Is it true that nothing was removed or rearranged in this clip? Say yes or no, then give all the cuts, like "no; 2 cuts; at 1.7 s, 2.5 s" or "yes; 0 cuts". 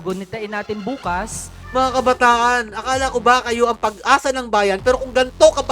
no; 1 cut; at 1.5 s